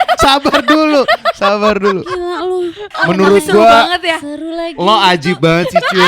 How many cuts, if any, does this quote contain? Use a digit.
1